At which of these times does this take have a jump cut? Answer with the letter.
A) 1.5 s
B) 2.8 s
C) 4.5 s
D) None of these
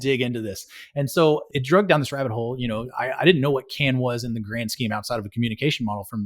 A